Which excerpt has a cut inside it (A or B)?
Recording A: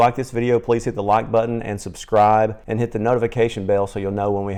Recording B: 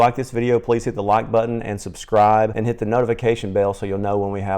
B